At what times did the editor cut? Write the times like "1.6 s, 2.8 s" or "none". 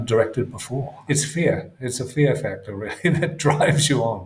0.9 s

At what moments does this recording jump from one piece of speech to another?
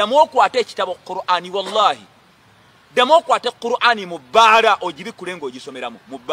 none

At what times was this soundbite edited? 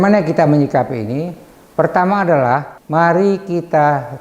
2.8 s

